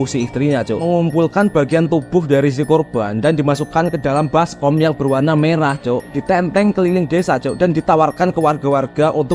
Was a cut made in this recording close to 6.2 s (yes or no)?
yes